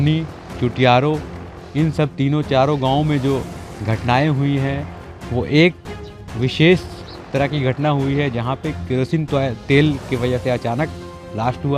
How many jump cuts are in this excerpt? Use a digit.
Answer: 0